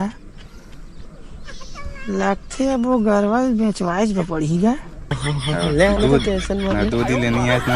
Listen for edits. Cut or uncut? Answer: cut